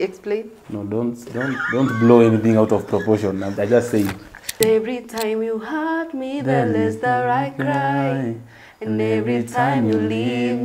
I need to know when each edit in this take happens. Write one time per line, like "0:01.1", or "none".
0:04.6